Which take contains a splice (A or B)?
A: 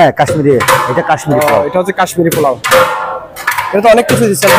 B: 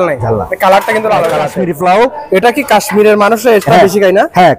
B